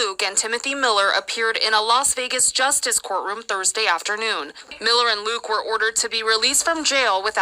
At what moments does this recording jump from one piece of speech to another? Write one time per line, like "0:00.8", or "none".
0:04.7